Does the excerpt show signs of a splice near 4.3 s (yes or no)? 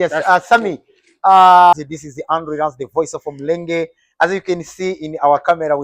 no